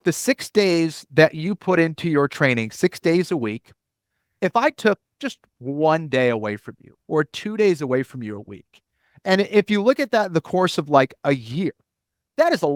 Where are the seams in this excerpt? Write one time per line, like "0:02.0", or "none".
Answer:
none